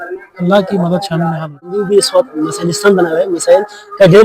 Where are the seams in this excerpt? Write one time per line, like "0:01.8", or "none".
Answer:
0:01.4